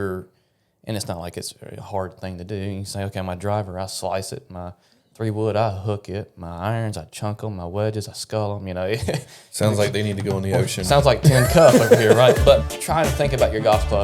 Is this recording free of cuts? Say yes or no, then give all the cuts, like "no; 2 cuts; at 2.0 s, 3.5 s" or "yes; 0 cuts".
no; 1 cut; at 12.7 s